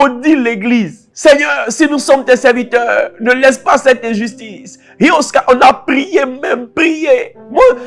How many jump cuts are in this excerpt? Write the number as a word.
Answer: one